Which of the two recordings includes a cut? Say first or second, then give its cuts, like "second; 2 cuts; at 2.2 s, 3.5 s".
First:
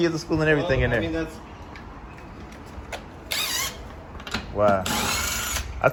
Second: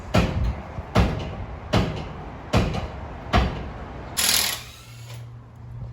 second; 1 cut; at 4.2 s